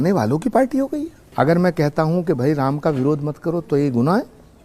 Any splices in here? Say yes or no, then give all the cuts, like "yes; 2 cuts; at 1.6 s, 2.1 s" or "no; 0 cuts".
yes; 1 cut; at 1.2 s